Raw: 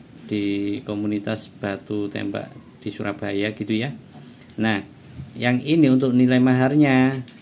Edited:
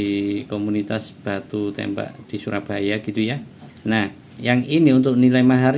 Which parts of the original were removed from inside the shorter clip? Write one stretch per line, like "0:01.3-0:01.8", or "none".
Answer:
0:02.6-0:02.8
0:04.5-0:04.9